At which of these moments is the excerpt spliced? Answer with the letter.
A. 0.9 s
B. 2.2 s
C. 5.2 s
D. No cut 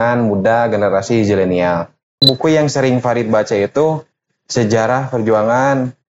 B